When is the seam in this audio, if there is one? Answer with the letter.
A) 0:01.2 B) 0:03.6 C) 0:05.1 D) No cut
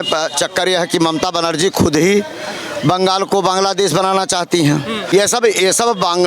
C